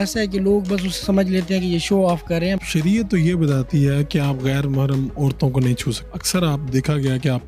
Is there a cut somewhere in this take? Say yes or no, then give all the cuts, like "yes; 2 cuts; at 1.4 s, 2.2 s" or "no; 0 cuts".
yes; 2 cuts; at 2.6 s, 6.1 s